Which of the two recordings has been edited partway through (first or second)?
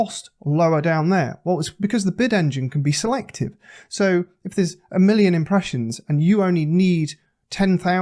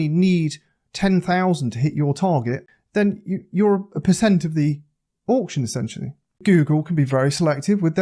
second